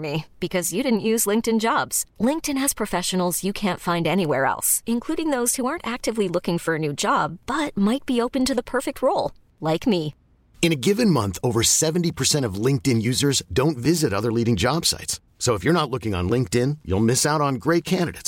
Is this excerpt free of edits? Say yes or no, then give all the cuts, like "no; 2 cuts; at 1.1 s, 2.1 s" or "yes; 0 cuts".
yes; 0 cuts